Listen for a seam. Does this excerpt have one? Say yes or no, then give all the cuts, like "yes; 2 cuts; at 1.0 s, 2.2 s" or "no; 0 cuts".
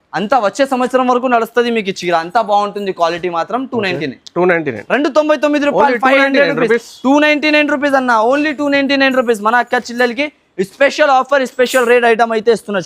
no; 0 cuts